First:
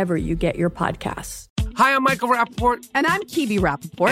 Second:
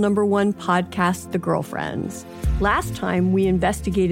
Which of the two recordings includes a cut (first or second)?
first